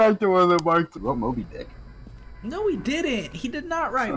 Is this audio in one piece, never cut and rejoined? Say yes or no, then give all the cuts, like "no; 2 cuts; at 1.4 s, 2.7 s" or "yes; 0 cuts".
no; 1 cut; at 0.9 s